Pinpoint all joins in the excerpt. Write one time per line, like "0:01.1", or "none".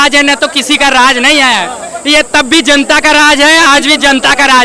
none